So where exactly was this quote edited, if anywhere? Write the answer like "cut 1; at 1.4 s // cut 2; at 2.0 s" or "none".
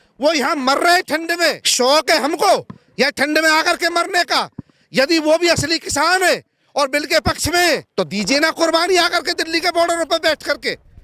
cut 1; at 1.6 s // cut 2; at 7.9 s